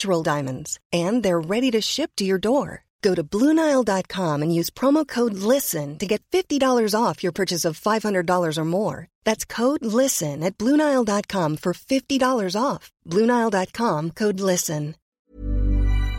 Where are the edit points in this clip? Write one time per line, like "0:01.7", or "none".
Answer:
0:15.2